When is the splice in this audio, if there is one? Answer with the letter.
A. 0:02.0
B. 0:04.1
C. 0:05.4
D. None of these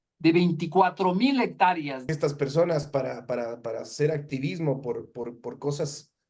A